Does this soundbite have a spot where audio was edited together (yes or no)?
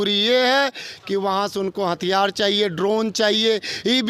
no